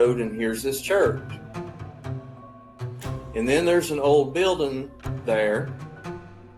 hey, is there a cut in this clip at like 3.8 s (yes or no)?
no